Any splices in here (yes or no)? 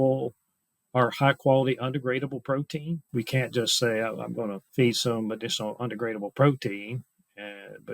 yes